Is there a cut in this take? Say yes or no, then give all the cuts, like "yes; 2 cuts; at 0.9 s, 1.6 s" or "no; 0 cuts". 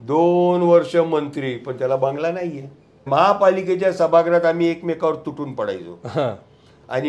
yes; 1 cut; at 3.0 s